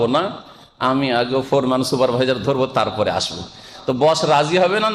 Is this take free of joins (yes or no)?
yes